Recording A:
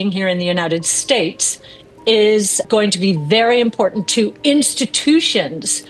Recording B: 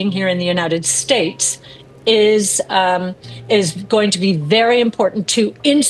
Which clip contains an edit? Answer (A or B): A